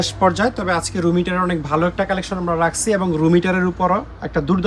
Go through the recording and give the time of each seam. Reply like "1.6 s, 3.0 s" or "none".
none

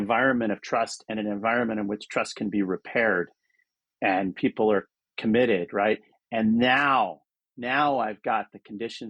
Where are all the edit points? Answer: none

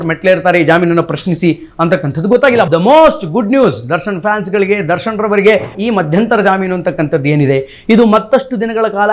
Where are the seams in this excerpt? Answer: 2.7 s, 5.8 s

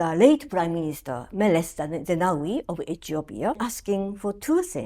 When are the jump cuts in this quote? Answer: 3.6 s

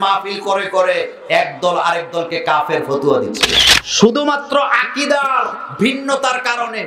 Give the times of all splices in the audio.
3.5 s

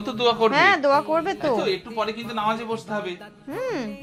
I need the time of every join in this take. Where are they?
none

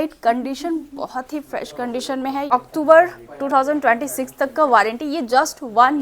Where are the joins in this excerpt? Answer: 2.5 s

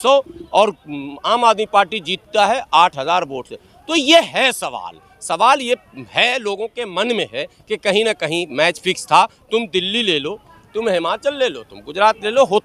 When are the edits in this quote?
none

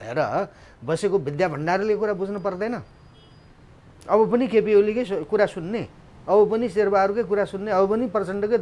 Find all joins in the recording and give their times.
none

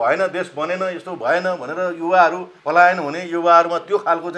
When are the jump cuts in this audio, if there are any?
2.5 s

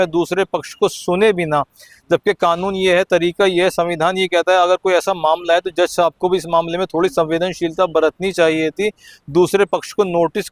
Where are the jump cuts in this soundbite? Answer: none

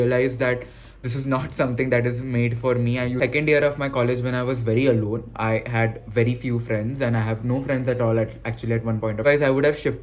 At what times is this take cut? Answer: 3.2 s, 9.2 s

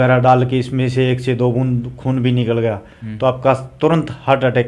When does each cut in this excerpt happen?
none

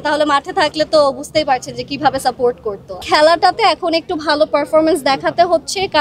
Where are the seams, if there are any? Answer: 3.0 s

